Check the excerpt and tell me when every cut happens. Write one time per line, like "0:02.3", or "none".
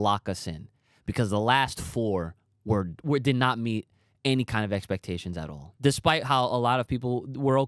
0:05.6